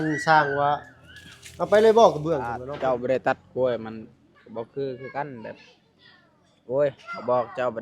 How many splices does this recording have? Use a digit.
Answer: 1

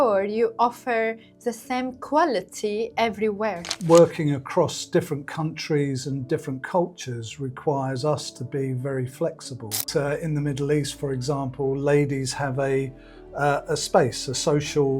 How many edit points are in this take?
2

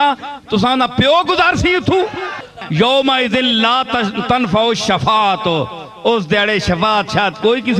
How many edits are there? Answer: 1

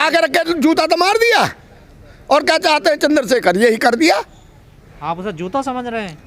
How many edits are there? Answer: 0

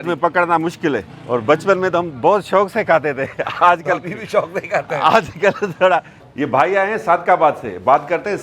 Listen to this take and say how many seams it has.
2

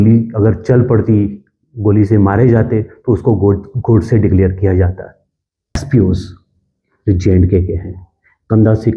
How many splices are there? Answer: 1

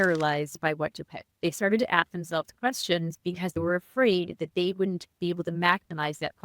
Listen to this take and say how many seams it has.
2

